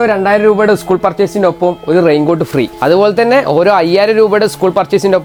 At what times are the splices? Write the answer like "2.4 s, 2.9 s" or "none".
none